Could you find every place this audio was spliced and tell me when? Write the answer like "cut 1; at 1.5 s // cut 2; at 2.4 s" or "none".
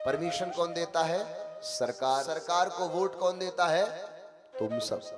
cut 1; at 2.3 s